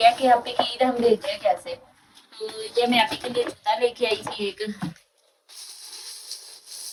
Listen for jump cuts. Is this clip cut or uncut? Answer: uncut